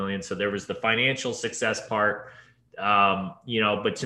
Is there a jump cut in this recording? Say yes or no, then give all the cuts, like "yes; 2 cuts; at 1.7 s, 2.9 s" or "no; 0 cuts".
no; 0 cuts